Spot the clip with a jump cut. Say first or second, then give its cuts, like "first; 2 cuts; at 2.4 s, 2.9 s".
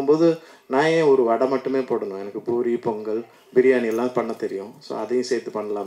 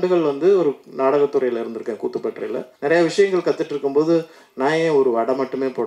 second; 1 cut; at 2.7 s